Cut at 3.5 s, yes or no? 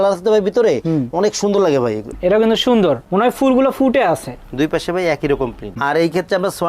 no